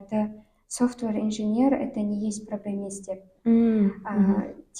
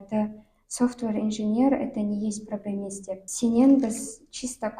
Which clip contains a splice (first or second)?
second